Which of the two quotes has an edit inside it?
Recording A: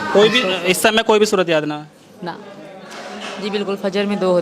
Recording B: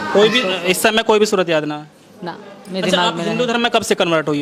A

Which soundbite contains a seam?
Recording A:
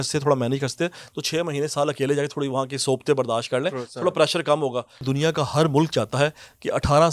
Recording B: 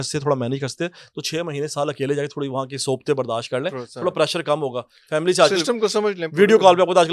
A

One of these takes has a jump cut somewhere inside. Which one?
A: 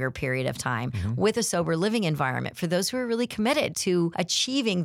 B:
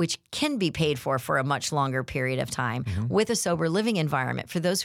A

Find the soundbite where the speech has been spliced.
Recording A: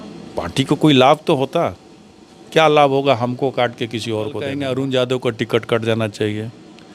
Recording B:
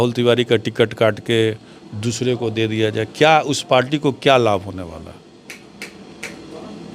A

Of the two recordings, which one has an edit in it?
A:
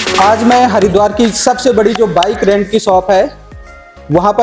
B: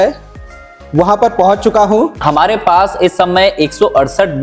B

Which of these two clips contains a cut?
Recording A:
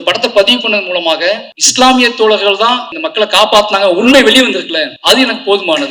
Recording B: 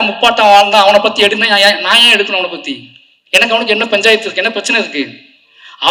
A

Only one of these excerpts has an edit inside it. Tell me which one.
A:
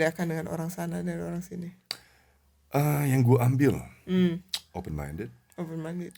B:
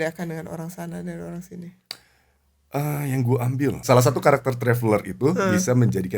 B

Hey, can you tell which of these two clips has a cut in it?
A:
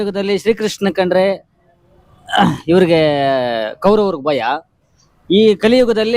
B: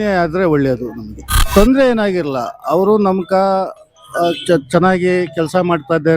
B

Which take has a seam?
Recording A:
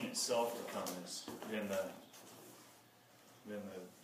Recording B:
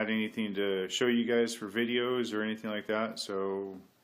A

